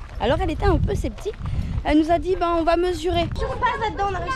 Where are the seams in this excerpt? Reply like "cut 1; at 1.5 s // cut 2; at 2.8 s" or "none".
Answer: cut 1; at 3.4 s